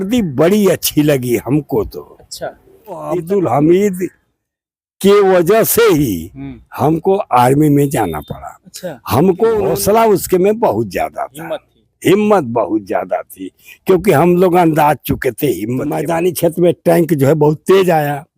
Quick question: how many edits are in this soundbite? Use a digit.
3